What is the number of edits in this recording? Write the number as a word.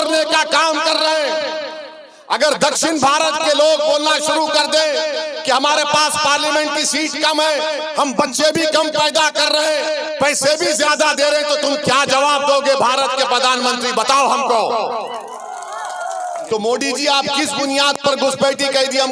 one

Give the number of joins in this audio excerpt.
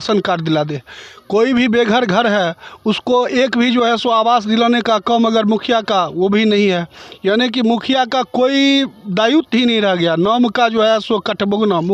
zero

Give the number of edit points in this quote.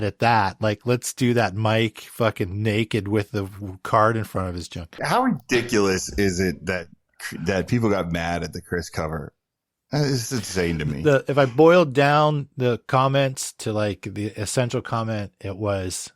one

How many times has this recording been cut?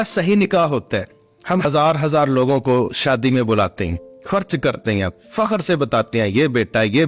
one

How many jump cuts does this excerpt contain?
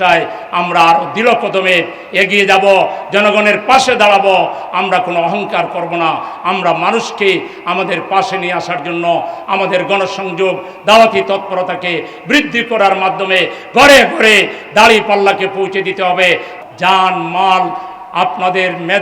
one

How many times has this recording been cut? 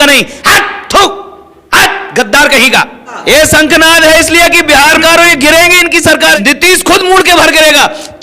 three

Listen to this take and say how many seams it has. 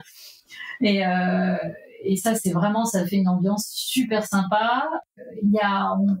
one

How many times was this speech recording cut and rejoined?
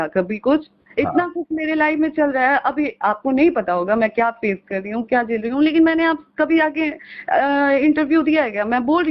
zero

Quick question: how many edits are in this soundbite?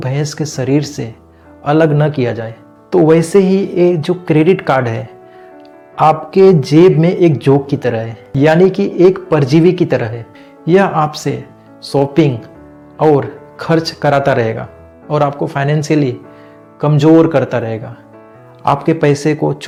zero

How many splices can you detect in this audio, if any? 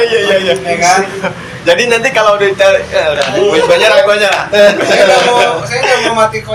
zero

